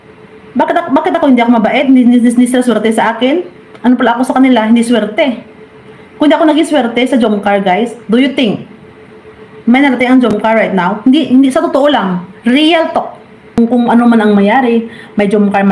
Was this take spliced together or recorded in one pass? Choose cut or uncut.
cut